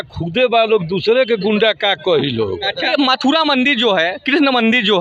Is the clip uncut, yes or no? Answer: no